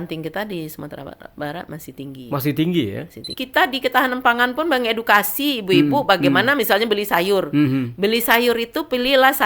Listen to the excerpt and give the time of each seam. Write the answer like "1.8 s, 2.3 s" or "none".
3.3 s